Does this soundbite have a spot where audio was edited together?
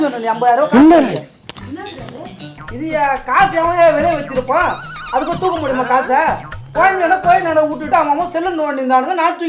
yes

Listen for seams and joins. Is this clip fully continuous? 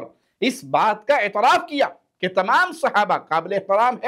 yes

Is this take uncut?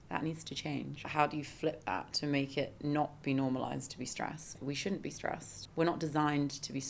no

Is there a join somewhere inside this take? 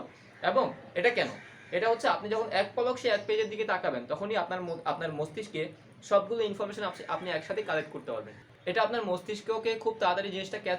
yes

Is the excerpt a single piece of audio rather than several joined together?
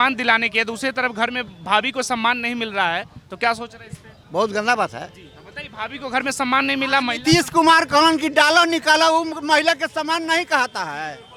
yes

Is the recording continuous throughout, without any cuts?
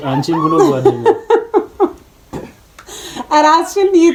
yes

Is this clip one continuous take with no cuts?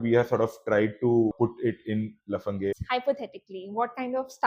no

